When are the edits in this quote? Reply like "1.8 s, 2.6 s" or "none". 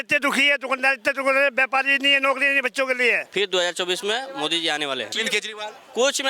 3.2 s, 5.1 s